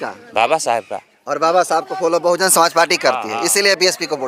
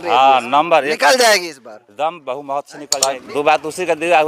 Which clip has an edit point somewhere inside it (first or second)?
second